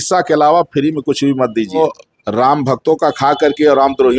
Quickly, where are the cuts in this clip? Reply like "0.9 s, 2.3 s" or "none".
1.8 s